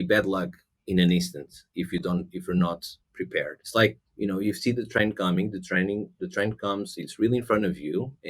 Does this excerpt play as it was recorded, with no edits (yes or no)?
no